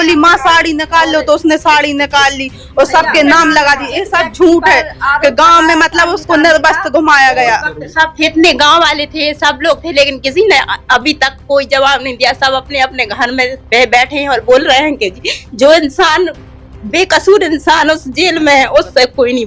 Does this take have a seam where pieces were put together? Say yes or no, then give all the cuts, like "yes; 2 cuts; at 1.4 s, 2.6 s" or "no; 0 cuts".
yes; 1 cut; at 7.8 s